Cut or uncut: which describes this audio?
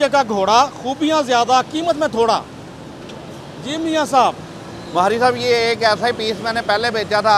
uncut